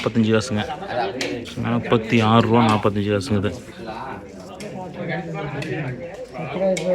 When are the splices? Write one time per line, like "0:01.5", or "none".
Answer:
0:04.6

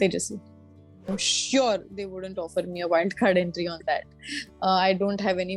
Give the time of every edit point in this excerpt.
0:01.1

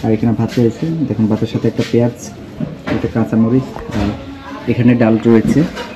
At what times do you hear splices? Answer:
none

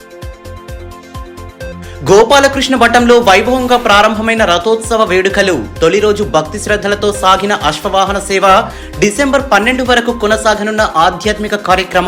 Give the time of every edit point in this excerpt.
0:01.3

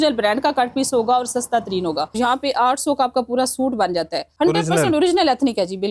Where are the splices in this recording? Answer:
0:02.1
0:04.2

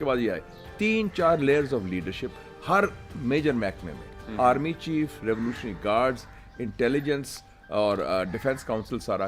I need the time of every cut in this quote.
none

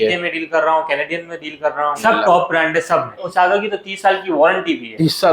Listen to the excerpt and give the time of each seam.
0:02.0
0:03.3

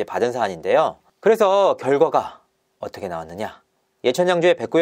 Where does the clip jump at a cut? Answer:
0:01.1

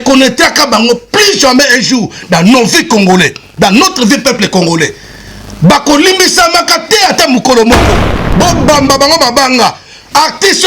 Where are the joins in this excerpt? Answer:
0:08.2

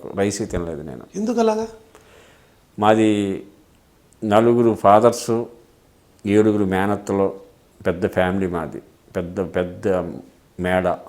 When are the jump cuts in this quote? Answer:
none

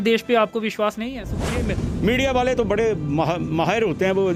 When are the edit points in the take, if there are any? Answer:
0:01.3

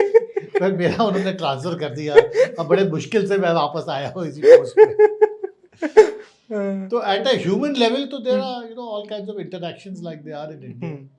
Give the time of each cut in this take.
none

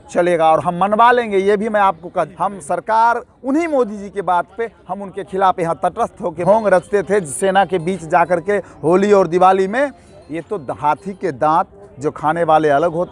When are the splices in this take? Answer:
0:02.3
0:06.4

